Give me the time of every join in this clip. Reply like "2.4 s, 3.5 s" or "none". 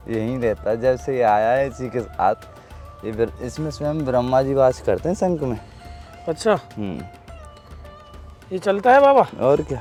none